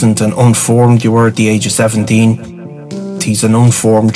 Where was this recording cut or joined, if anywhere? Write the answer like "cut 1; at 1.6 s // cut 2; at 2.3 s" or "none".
cut 1; at 3.1 s